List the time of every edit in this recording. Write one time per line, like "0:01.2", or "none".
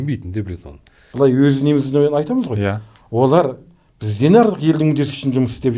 0:01.0